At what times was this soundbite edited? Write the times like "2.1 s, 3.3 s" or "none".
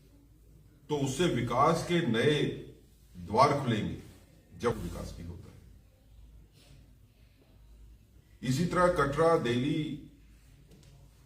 4.7 s